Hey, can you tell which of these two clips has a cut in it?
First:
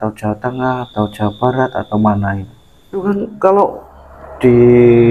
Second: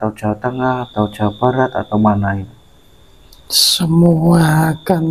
first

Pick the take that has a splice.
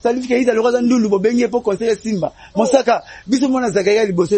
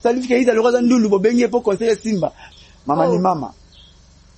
second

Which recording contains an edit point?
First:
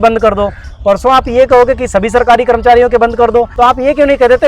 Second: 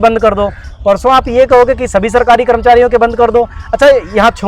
first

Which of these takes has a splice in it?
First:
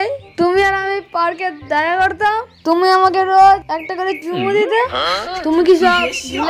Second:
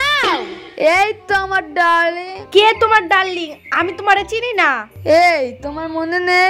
second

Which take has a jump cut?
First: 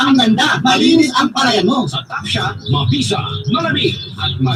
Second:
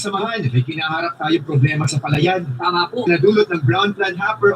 second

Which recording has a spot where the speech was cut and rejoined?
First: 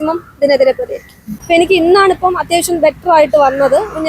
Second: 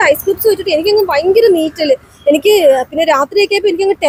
first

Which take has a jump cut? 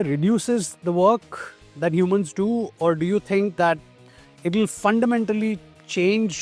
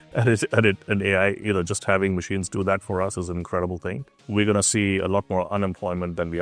second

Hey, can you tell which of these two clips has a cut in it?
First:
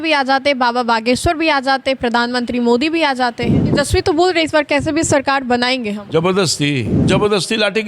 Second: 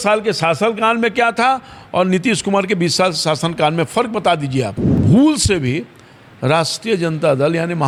first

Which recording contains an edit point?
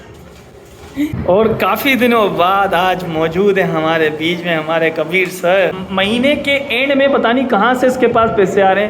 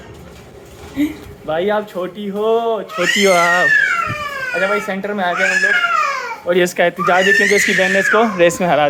first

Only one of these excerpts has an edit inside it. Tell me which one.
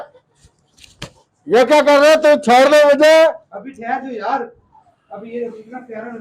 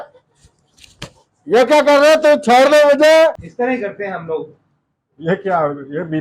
second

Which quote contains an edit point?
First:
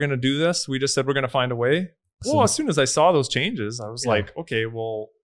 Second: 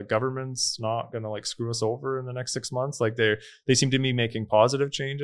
first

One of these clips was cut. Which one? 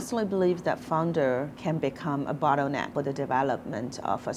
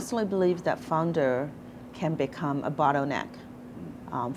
first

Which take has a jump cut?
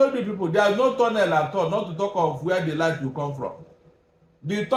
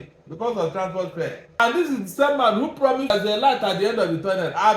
second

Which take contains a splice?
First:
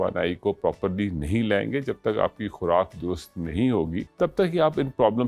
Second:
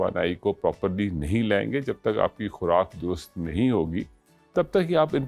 first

